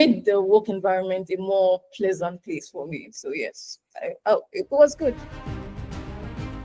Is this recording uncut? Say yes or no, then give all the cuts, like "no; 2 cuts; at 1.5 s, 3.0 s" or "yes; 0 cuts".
no; 1 cut; at 5.2 s